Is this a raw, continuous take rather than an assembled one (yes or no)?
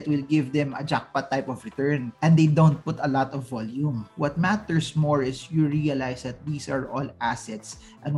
yes